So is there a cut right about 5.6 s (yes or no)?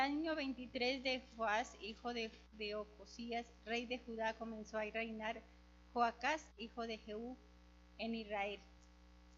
yes